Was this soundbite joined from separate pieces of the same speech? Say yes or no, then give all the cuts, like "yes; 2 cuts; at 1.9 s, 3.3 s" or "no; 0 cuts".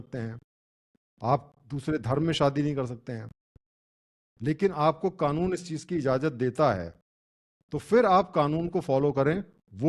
no; 0 cuts